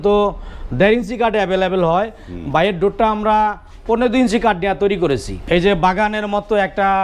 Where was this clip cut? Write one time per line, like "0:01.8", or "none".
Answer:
0:05.3